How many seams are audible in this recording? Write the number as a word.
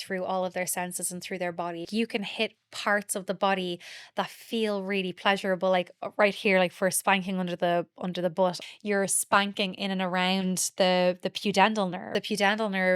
three